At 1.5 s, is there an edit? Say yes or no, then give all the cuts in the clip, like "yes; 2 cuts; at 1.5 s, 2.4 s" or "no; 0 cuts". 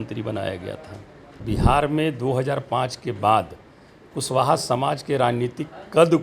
yes; 1 cut; at 1.5 s